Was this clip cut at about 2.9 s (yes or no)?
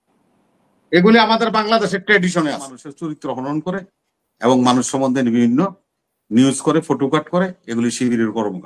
yes